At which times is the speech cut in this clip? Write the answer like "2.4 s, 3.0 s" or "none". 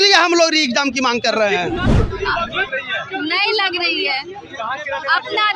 1.9 s